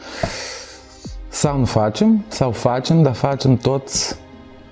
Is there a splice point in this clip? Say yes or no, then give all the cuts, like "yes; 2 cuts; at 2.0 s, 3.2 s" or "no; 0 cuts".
no; 0 cuts